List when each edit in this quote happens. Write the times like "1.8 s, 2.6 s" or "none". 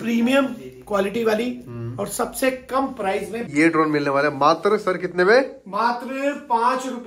3.5 s